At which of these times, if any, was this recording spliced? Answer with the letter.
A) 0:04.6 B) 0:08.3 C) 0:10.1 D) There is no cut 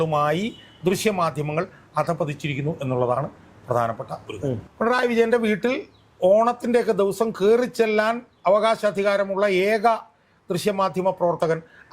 A